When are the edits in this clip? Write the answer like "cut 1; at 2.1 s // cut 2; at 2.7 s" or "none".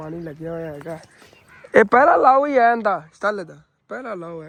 none